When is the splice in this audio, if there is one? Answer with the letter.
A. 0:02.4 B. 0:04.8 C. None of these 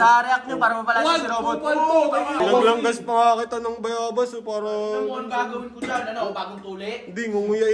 A